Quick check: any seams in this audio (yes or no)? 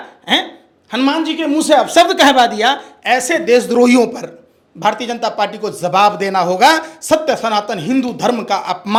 no